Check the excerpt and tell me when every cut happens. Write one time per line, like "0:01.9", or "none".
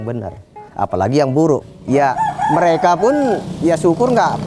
0:01.7
0:03.5